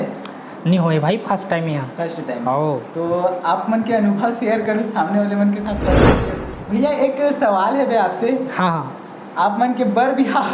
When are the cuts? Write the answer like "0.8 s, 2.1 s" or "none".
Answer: 6.0 s